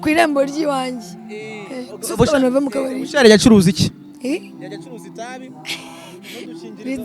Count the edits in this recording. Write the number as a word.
zero